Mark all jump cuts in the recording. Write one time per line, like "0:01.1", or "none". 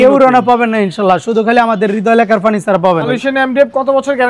0:03.1